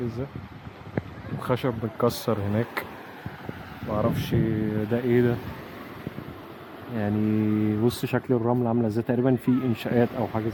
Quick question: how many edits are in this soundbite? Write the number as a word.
zero